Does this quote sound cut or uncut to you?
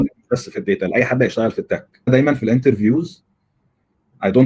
cut